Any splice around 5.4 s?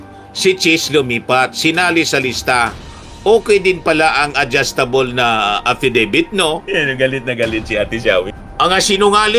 no; 1 cut; at 6.6 s

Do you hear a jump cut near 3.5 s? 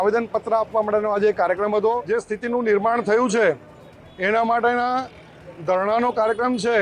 no; 1 cut; at 2.0 s

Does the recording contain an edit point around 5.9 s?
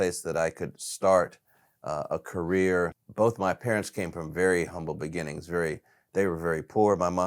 no; 1 cut; at 3.0 s

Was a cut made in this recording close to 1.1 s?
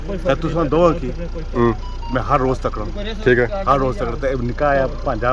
no; 0 cuts

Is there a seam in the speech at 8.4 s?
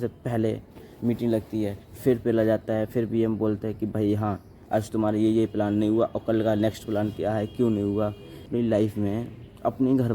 yes; 1 cut; at 8.4 s

